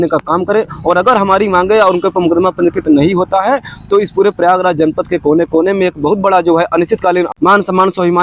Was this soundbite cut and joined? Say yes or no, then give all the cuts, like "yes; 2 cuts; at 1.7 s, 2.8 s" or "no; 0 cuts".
yes; 1 cut; at 7.3 s